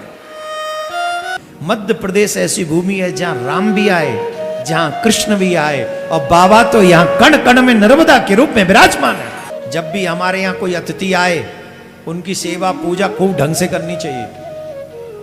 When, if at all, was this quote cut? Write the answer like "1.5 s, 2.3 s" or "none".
1.3 s, 9.5 s

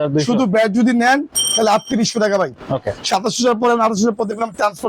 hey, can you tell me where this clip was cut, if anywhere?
2.7 s

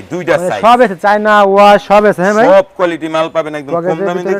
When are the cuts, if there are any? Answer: none

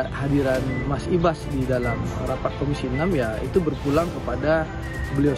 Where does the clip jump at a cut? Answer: none

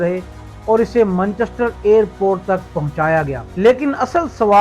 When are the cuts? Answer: 3.4 s

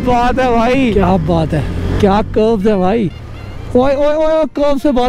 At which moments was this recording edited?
0.9 s

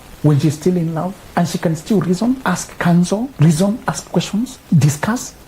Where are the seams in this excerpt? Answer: 1.2 s, 2.4 s, 3.3 s, 4.7 s

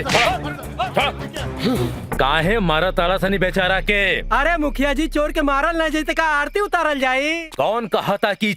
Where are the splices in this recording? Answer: 2.1 s

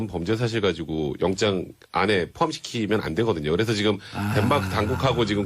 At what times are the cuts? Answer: 2.1 s

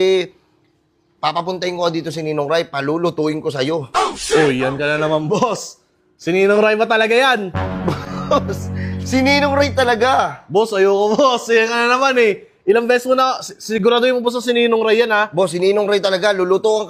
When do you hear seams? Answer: none

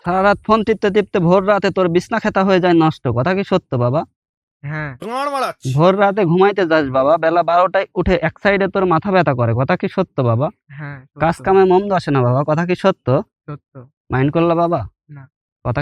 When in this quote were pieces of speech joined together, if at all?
none

